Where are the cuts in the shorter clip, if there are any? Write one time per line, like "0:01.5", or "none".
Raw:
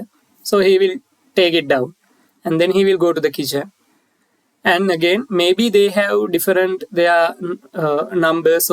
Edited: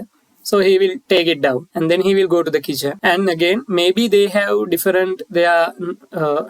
0:01.2
0:03.0